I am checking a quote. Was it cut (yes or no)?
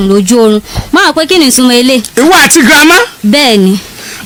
no